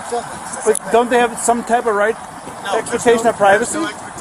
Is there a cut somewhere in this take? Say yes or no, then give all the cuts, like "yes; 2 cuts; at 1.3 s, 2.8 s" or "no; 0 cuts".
no; 0 cuts